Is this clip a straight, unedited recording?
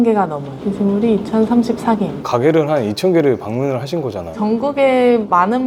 yes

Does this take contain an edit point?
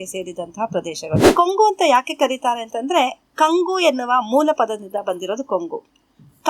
yes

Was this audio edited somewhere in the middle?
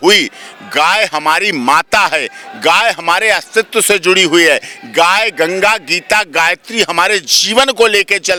no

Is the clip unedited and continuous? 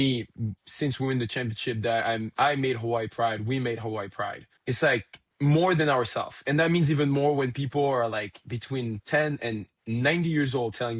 no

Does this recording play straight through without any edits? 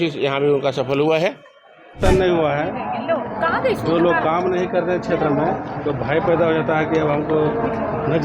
no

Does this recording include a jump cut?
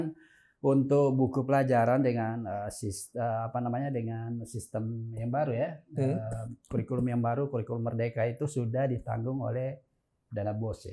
no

